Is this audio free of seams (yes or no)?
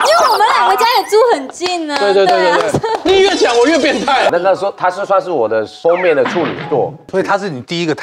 no